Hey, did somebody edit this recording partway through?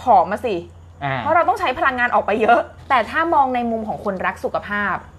yes; 1 cut; at 2.8 s

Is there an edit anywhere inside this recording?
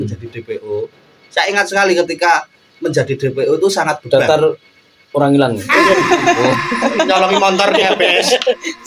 no; 0 cuts

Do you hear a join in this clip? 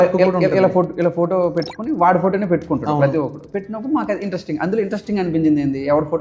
no; 0 cuts

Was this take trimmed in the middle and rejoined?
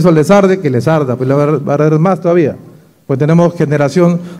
no; 0 cuts

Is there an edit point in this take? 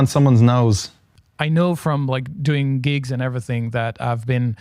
yes; 1 cut; at 1.0 s

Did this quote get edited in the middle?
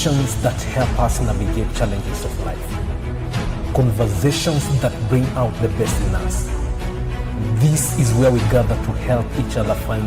no; 0 cuts

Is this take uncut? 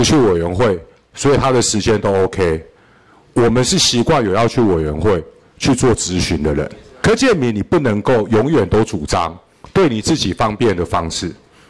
no; 1 cut; at 6.8 s

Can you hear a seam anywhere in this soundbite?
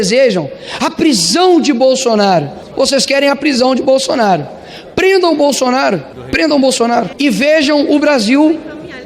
yes; 3 cuts; at 2.6 s, 6.2 s, 7.1 s

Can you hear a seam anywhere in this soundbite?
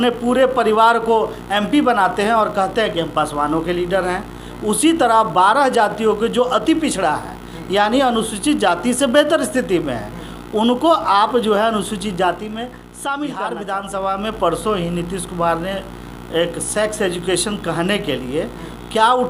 yes; 1 cut; at 13.6 s

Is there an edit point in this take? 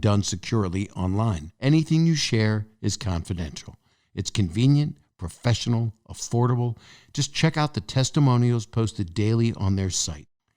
yes; 1 cut; at 1.5 s

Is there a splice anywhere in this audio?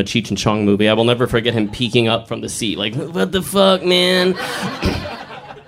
yes; 1 cut; at 4.7 s

